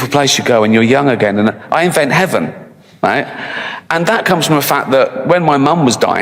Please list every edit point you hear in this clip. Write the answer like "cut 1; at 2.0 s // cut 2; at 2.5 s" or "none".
none